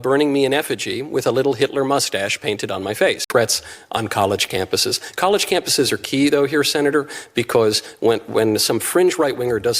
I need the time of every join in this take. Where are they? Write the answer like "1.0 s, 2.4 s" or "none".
3.3 s